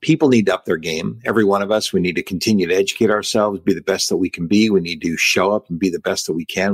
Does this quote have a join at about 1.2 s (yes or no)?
no